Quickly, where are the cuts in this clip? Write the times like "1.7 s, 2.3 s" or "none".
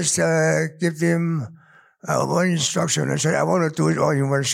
none